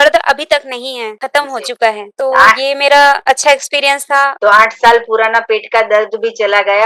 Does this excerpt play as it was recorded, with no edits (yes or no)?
no